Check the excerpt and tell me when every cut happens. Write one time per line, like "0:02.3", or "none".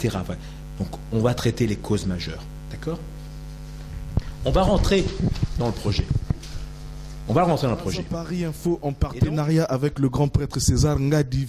0:08.2